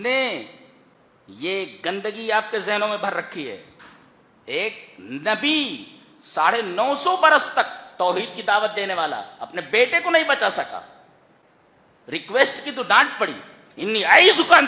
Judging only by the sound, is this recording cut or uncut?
uncut